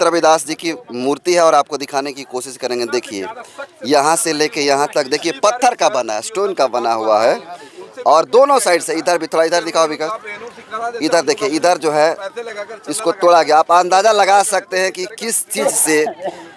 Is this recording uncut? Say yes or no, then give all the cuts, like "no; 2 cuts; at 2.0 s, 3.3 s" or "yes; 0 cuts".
yes; 0 cuts